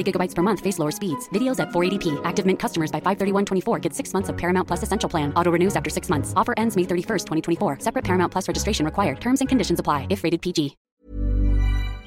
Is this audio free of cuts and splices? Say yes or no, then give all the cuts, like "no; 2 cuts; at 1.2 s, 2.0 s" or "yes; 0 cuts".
no; 1 cut; at 10.8 s